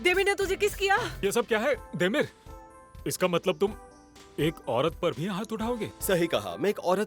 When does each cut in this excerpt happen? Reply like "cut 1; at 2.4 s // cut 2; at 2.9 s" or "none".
cut 1; at 1.2 s // cut 2; at 5.9 s